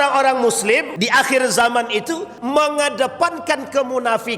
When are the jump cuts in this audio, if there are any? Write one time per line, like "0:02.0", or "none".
0:00.9
0:02.3